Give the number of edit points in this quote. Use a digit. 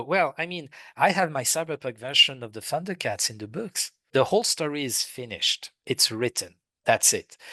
1